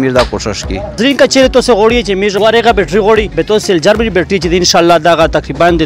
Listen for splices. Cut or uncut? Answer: cut